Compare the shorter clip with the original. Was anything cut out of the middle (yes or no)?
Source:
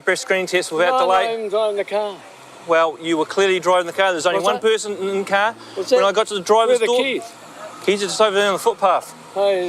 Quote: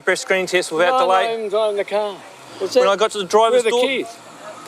yes